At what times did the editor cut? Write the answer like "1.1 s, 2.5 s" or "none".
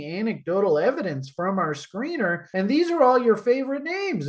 2.4 s